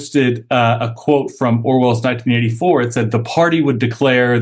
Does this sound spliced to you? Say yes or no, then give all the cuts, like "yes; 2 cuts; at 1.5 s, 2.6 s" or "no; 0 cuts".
no; 0 cuts